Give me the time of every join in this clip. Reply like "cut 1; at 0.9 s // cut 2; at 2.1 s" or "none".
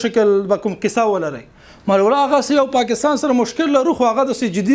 none